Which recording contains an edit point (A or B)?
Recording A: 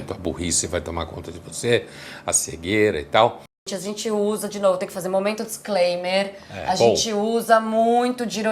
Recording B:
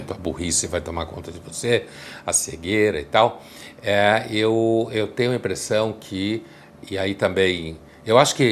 A